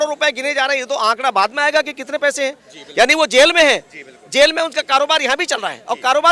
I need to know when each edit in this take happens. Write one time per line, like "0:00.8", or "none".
none